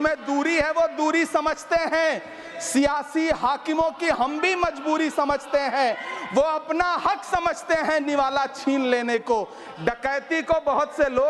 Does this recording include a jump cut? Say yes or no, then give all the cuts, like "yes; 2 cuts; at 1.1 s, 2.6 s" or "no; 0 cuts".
no; 0 cuts